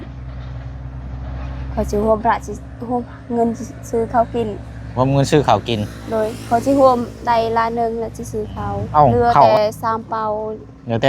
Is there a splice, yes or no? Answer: yes